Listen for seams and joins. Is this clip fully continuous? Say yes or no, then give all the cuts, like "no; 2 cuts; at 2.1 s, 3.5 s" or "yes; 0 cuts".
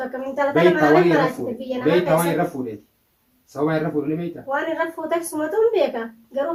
yes; 0 cuts